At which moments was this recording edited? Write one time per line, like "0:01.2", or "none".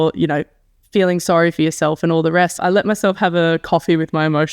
0:02.5